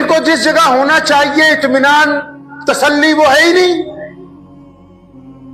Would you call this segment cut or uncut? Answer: uncut